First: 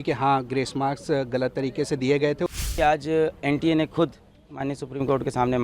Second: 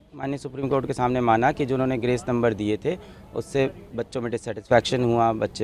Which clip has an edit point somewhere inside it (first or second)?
first